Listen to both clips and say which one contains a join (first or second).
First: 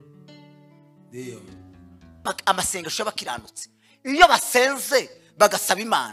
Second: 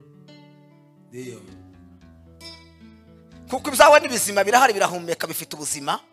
first